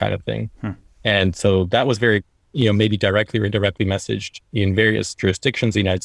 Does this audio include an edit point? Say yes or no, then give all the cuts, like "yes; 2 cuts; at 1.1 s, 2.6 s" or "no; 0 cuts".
no; 0 cuts